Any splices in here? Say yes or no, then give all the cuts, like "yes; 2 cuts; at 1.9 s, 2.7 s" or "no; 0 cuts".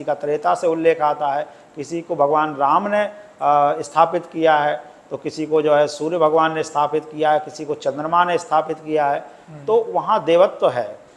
no; 0 cuts